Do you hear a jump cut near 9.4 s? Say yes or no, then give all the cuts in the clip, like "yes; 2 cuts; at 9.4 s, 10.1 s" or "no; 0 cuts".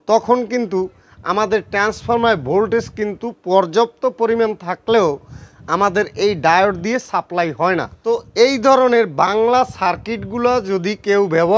no; 1 cut; at 7.9 s